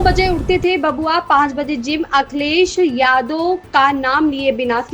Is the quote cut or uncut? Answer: uncut